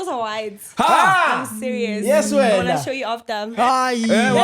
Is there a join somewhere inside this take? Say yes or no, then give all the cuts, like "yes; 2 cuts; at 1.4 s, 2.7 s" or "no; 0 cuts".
yes; 1 cut; at 3.4 s